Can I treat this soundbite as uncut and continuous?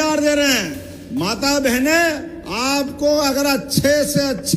yes; 0 cuts

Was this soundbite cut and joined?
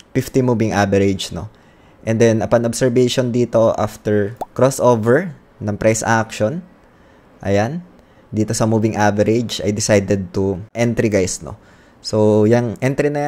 yes; 2 cuts; at 4.4 s, 10.7 s

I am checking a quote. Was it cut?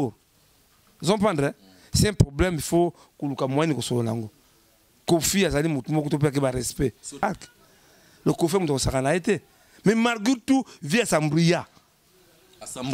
yes; 1 cut; at 7.2 s

